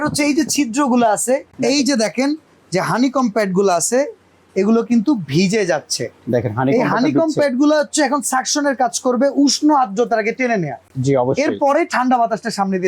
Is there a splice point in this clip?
yes; 1 cut; at 1.5 s

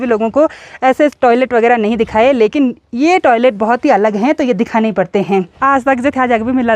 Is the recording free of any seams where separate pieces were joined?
no; 1 cut; at 5.5 s

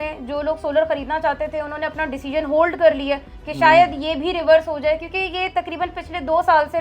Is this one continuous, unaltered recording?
yes; 0 cuts

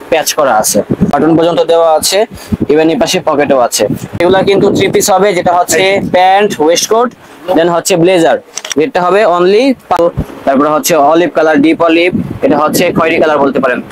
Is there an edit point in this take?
yes; 3 cuts; at 1.1 s, 4.2 s, 10.0 s

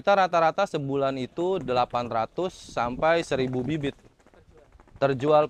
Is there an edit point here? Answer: no; 0 cuts

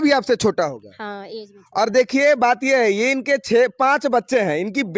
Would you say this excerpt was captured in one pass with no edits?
yes; 0 cuts

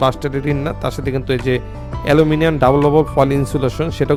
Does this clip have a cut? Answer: no; 0 cuts

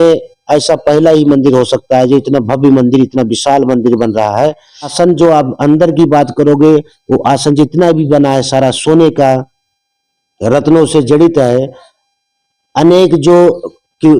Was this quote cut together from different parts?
yes; 1 cut; at 4.9 s

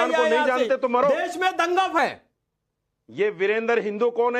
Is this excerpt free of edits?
no; 1 cut; at 2.0 s

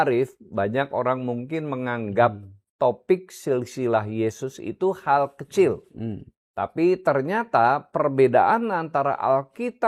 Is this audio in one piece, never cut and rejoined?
yes; 0 cuts

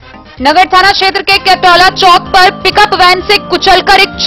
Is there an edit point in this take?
no; 0 cuts

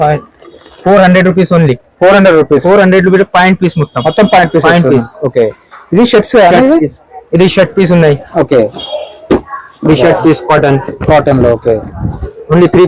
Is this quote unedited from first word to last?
yes; 0 cuts

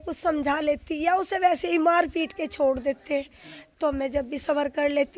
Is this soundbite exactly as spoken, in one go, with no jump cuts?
yes; 0 cuts

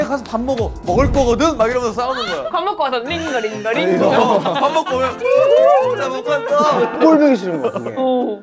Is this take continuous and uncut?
yes; 0 cuts

